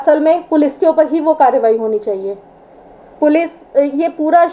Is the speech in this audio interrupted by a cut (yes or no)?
no